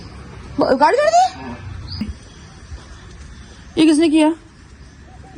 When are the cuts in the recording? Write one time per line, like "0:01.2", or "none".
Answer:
0:02.0